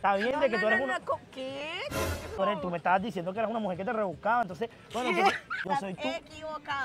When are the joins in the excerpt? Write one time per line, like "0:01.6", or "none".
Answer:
0:02.4
0:05.6